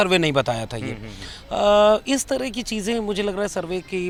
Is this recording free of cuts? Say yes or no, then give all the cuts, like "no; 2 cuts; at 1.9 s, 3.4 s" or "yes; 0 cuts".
yes; 0 cuts